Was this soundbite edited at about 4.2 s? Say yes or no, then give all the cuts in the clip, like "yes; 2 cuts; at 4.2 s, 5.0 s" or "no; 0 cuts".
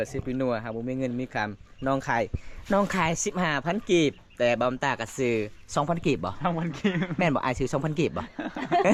no; 0 cuts